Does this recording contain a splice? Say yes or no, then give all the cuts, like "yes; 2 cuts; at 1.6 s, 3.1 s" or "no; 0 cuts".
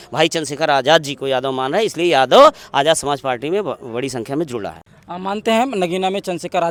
no; 0 cuts